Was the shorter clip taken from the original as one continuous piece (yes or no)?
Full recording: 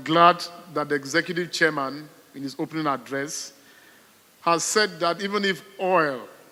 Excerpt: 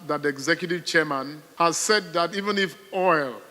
no